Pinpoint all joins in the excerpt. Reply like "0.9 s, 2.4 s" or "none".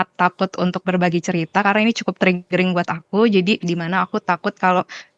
none